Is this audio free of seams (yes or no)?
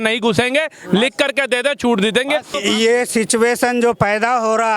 no